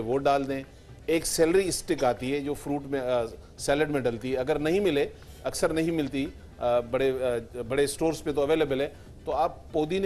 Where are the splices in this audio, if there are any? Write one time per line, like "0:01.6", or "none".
0:03.0